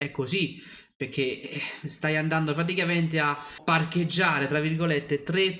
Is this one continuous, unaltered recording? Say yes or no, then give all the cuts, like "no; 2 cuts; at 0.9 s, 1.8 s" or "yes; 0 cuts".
no; 1 cut; at 3.6 s